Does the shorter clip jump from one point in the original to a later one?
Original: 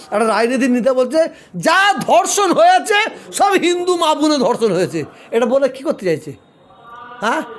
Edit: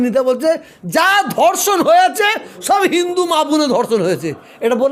no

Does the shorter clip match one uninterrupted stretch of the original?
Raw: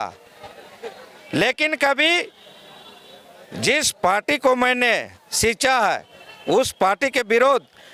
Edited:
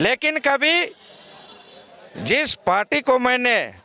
yes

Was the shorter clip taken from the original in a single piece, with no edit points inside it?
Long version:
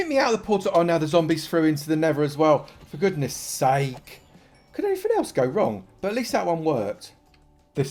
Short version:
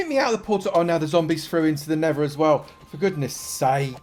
yes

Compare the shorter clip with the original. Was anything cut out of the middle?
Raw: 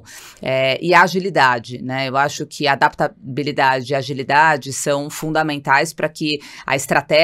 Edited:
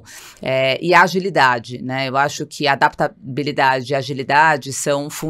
no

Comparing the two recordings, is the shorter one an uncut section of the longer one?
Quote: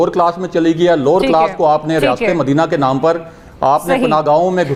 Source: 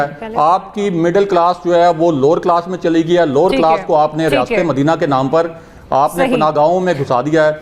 yes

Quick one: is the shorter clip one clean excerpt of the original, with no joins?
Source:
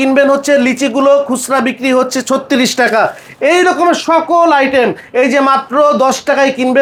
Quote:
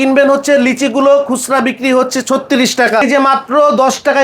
no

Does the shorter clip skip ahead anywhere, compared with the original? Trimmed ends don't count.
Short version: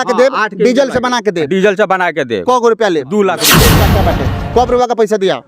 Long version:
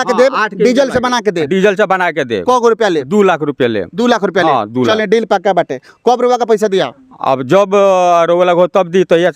yes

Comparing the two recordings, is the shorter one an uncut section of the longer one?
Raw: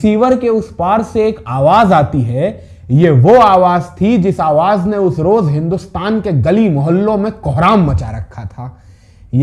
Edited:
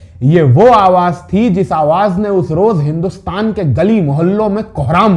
yes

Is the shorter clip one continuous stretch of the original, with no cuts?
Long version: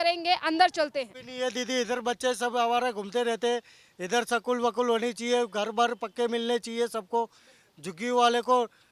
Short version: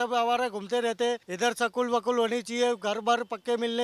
no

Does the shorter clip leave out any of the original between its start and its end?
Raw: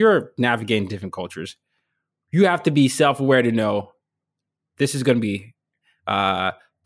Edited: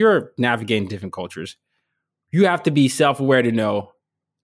no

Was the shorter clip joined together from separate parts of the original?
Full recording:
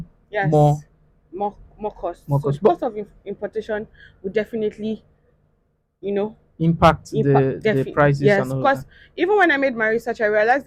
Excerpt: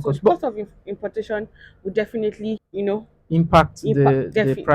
yes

